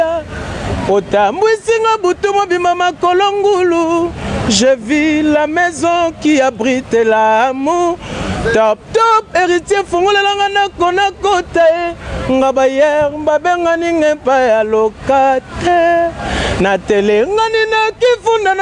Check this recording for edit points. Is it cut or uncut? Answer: uncut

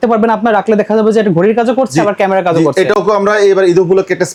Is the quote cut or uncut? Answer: uncut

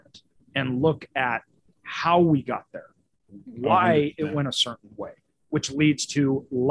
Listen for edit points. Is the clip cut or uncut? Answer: uncut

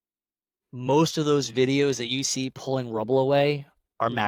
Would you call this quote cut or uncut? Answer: uncut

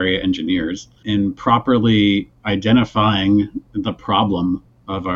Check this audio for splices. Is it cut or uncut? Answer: cut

